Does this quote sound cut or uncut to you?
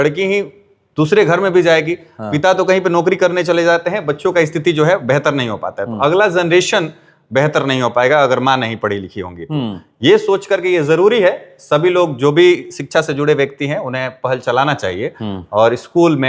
uncut